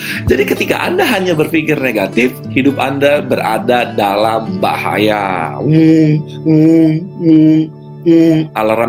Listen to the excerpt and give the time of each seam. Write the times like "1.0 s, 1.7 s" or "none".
none